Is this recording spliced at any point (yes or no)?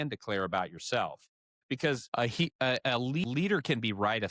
yes